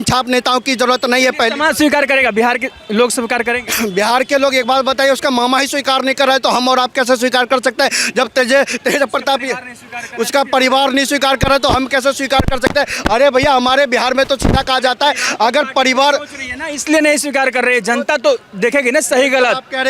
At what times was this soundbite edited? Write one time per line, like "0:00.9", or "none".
none